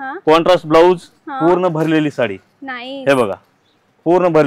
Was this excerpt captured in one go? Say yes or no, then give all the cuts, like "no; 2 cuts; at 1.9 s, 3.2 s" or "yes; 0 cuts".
yes; 0 cuts